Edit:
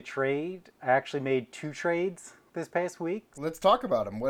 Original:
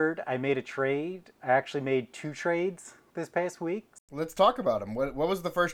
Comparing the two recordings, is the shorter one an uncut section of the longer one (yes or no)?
no